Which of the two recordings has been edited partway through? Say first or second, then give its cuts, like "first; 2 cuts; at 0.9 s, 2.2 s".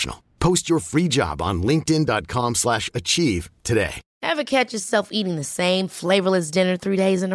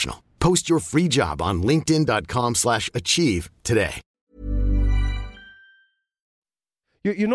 first; 1 cut; at 4.1 s